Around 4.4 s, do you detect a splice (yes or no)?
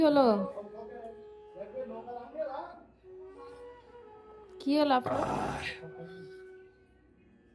no